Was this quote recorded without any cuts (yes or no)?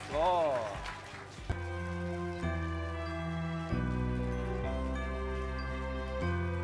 yes